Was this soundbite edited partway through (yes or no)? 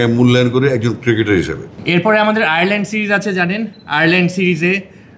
yes